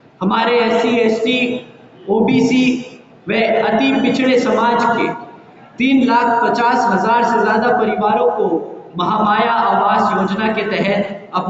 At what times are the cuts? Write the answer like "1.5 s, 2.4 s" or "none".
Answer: none

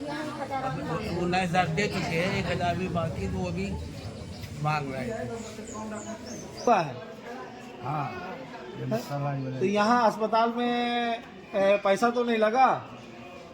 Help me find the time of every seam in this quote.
6.7 s

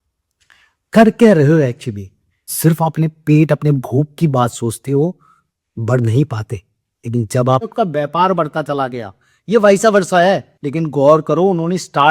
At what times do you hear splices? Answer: 2.5 s, 7.7 s

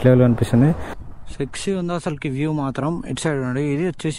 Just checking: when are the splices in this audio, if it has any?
0.9 s

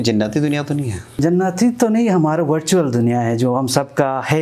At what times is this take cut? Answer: 1.2 s

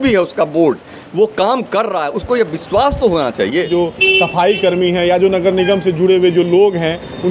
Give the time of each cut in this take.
3.6 s

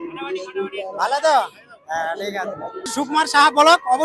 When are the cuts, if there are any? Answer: 3.0 s

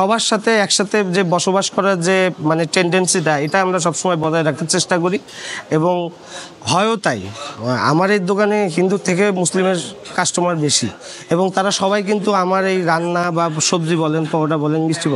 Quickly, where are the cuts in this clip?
none

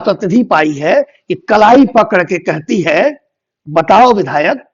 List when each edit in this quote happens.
none

